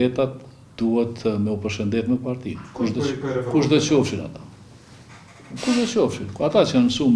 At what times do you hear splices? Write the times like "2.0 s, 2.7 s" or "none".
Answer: none